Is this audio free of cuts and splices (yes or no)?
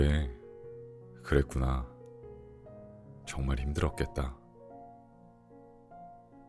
no